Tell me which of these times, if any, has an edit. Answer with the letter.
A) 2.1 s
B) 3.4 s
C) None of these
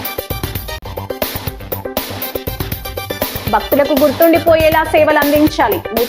B